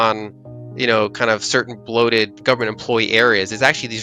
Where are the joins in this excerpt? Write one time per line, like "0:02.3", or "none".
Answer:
0:02.3

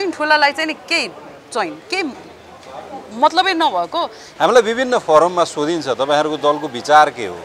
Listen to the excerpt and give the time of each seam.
0:04.2

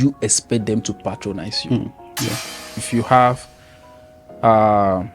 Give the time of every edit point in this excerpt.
0:02.8

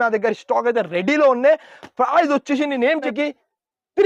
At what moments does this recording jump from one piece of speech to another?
0:03.1

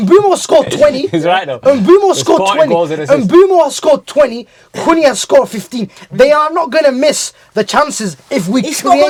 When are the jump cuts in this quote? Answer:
none

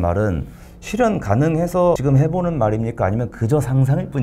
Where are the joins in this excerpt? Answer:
0:02.0

